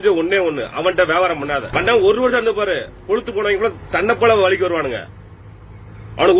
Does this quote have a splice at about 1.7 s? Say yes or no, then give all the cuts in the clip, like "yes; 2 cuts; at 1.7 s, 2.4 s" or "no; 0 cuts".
yes; 1 cut; at 1.7 s